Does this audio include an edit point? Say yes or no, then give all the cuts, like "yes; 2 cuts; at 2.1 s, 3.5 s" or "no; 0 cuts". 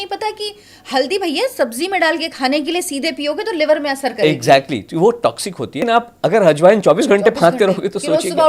yes; 1 cut; at 5.8 s